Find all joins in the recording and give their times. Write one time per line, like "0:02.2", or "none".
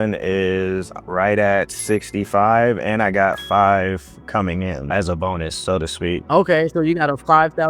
none

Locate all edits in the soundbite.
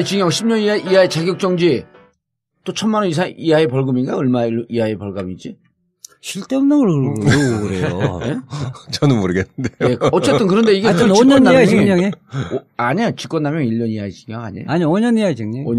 none

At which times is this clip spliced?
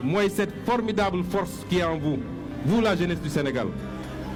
none

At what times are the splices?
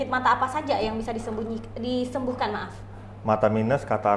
none

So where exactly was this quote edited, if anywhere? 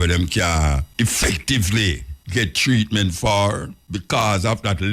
0:00.9
0:02.1
0:03.8

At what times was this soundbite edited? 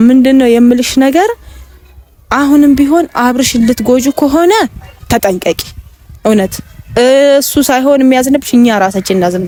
none

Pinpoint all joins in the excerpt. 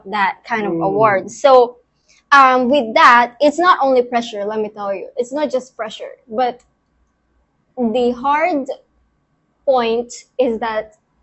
none

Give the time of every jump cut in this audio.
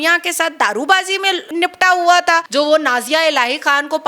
0:01.5
0:02.5

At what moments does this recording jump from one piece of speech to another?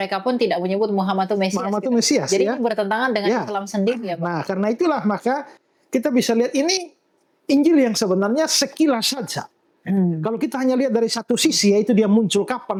none

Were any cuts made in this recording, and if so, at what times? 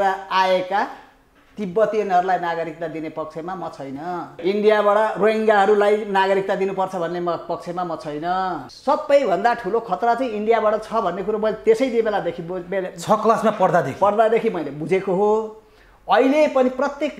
0:04.4
0:08.7

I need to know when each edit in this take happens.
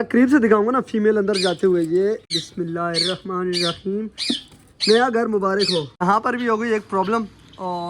0:02.4
0:05.9

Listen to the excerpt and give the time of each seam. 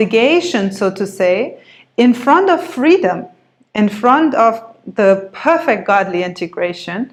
none

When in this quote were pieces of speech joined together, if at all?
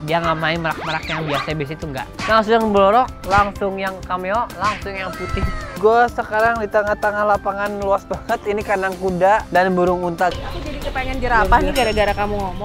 0:02.2
0:05.8
0:10.3

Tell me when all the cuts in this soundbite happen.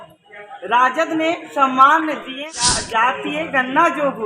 0:02.4

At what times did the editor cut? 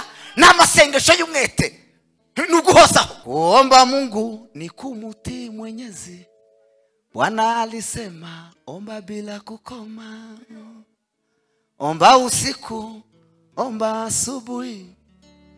0:03.2

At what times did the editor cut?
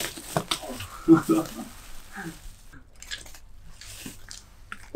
none

